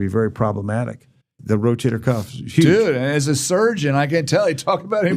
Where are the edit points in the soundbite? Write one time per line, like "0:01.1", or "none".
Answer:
0:01.3